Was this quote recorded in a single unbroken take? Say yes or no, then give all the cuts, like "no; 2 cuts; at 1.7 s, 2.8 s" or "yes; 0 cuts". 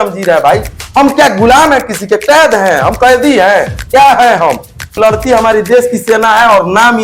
no; 1 cut; at 4.9 s